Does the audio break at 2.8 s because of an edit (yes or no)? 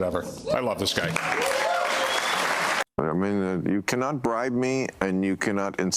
yes